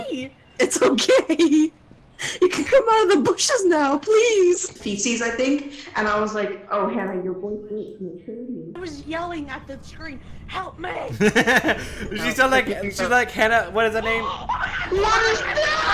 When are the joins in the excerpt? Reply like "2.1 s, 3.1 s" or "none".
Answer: 4.7 s, 8.8 s